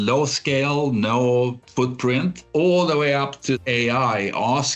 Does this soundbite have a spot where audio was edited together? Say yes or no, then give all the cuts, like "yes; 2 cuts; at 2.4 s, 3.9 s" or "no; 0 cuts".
yes; 2 cuts; at 2.4 s, 3.6 s